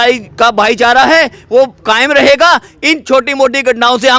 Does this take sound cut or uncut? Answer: uncut